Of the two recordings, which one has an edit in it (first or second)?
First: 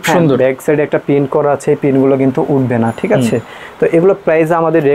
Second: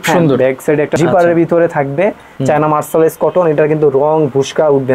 second